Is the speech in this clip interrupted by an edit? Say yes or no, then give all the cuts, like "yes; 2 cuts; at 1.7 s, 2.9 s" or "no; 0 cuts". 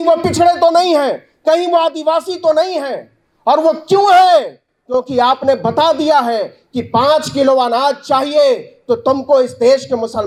no; 0 cuts